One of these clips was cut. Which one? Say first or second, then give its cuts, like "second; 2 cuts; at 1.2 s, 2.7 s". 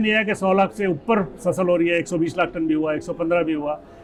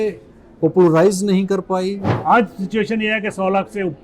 second; 1 cut; at 2.1 s